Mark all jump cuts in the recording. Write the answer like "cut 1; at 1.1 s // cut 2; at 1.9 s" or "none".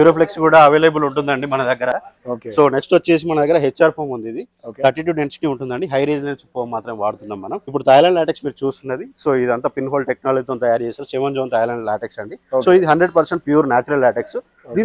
none